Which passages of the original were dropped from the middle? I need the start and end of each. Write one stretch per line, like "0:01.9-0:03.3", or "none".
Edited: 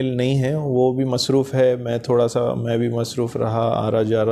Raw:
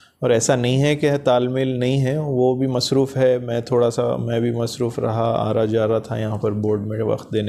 none